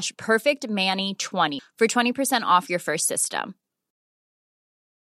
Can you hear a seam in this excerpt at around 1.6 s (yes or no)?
yes